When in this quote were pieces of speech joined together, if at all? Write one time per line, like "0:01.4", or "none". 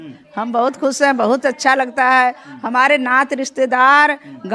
none